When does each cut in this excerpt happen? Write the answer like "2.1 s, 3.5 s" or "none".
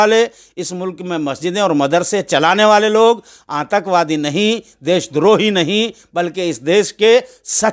none